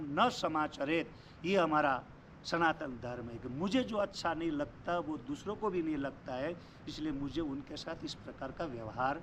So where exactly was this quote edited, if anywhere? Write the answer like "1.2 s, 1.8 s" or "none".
none